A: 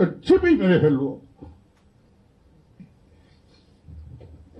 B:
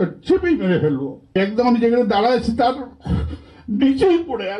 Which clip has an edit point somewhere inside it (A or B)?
B